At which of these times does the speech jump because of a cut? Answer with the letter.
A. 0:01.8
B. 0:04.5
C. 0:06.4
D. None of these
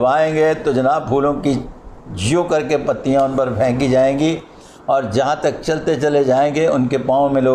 D